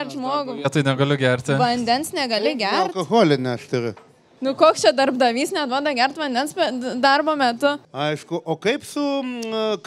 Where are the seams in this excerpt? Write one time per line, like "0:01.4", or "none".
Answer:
0:07.9